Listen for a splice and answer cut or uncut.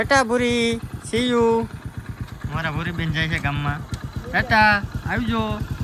uncut